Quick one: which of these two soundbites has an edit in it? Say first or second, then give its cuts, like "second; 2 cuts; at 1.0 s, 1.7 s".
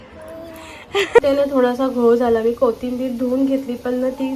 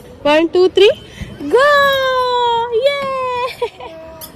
first; 1 cut; at 1.2 s